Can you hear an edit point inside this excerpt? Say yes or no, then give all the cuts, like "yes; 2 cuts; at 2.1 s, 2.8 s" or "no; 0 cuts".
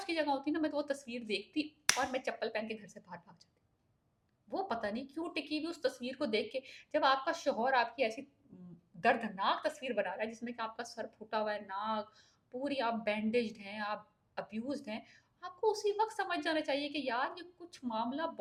no; 0 cuts